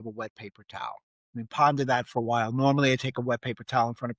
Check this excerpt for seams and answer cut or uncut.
uncut